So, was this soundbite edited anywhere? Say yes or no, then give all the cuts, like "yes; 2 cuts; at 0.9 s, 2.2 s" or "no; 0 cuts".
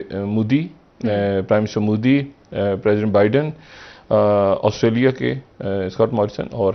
no; 0 cuts